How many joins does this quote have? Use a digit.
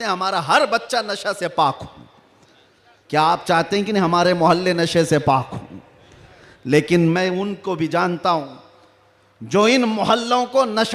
0